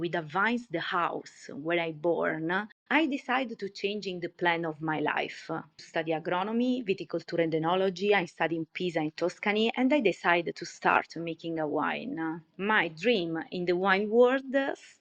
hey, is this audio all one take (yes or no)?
no